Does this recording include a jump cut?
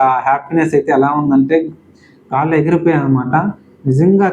no; 0 cuts

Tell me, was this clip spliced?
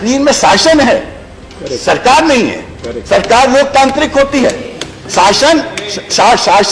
no; 0 cuts

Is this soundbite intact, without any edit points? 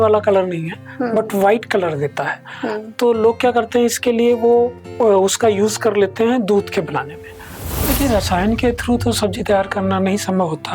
no; 1 cut; at 7.5 s

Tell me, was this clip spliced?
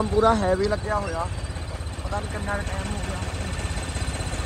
no; 0 cuts

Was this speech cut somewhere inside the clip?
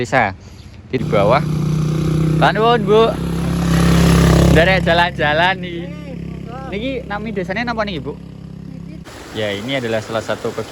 yes; 2 cuts; at 1.0 s, 9.0 s

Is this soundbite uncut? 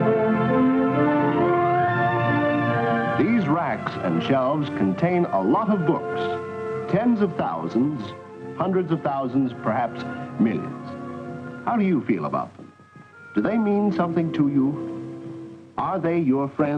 no; 1 cut; at 3.8 s

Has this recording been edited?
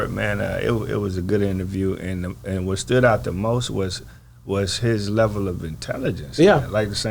no; 0 cuts

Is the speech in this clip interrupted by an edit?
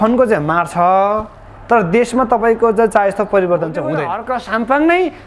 yes; 1 cut; at 4.1 s

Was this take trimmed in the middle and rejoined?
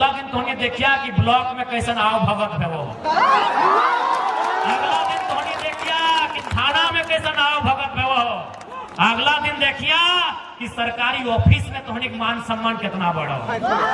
no; 0 cuts

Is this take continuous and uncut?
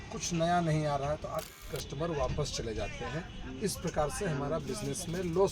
no; 1 cut; at 1.6 s

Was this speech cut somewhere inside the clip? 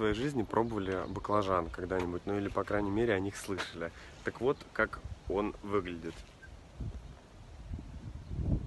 no; 0 cuts

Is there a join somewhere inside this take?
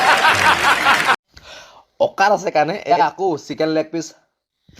yes; 1 cut; at 1.2 s

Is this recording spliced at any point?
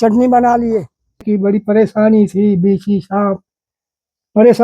yes; 1 cut; at 1.3 s

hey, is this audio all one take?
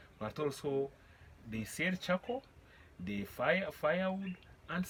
yes; 0 cuts

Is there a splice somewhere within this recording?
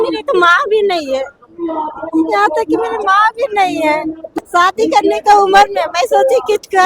yes; 1 cut; at 4.3 s

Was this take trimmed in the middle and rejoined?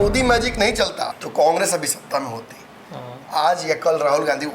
yes; 1 cut; at 1.2 s

